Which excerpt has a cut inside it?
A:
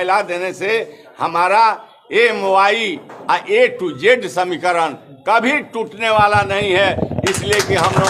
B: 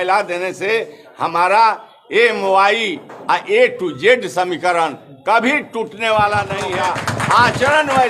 B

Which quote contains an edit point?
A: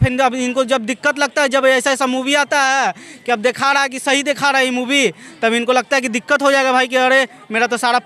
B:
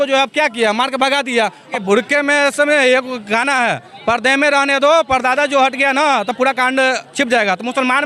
B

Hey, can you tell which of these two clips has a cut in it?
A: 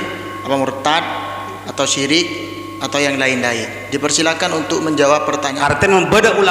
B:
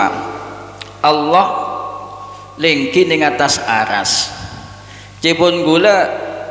A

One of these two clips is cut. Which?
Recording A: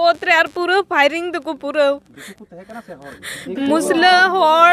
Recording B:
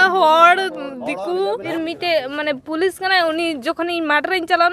B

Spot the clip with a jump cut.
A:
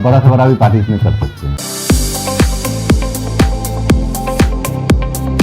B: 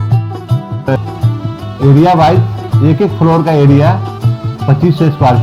A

